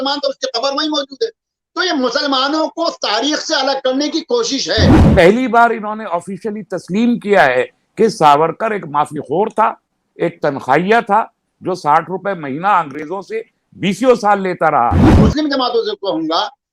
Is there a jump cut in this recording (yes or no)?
yes